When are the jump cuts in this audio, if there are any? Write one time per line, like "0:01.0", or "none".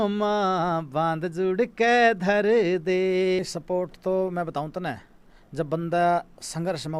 0:03.4